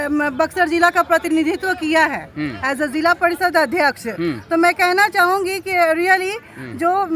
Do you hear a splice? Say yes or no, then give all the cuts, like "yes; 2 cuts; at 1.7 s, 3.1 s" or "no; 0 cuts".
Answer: no; 0 cuts